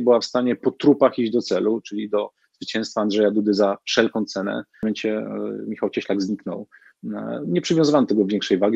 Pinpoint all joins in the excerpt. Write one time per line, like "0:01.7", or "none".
0:04.8